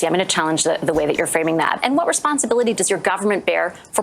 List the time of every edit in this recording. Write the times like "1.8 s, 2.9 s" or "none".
1.8 s